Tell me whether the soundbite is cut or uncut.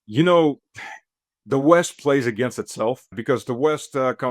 cut